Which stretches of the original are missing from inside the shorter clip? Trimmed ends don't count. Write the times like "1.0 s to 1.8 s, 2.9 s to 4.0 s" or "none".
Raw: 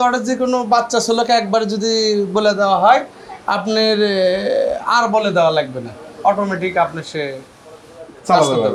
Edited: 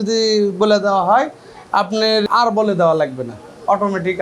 4.0 s to 4.8 s